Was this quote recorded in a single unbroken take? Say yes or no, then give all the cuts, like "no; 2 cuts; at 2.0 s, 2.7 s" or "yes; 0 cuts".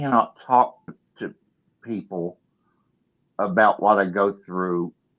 no; 1 cut; at 1.0 s